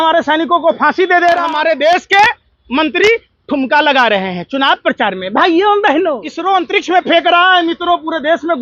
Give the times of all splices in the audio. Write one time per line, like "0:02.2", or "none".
0:01.4
0:06.3